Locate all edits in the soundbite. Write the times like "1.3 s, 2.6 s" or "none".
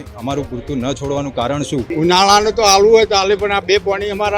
1.9 s

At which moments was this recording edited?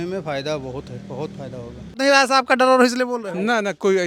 2.0 s

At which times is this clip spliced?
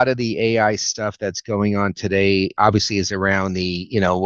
2.5 s

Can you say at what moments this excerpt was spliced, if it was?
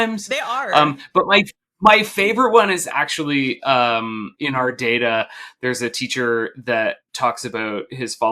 4.3 s

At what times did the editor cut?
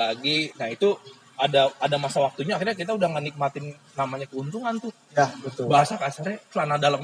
none

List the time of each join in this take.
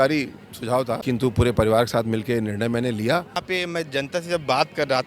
1.0 s, 3.4 s

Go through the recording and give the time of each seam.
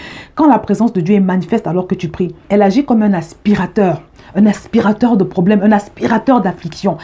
none

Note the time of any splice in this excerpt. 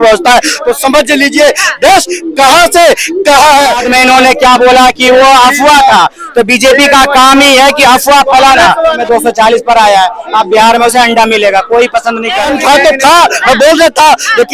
3.8 s, 9.0 s, 12.4 s

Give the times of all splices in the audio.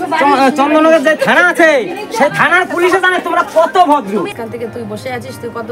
4.3 s

